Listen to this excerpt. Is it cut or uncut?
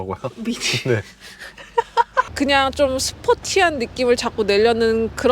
cut